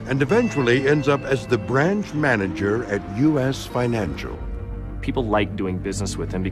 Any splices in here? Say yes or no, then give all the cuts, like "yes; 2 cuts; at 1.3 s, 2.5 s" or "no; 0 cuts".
yes; 1 cut; at 4.3 s